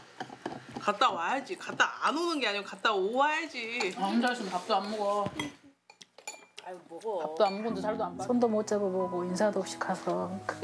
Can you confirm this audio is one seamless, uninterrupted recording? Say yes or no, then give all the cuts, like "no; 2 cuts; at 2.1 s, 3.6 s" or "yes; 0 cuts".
no; 2 cuts; at 3.9 s, 8.1 s